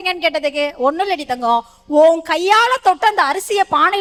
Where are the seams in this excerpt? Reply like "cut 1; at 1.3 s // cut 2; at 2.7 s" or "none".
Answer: none